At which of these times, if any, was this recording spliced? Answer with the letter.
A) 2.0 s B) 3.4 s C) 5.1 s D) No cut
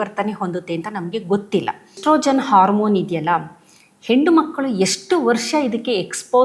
A